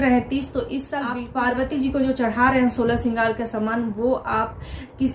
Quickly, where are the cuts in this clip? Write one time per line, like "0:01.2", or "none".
0:01.2